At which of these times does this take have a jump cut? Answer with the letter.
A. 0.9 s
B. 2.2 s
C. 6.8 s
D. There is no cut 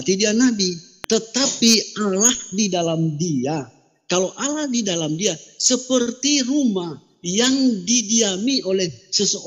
A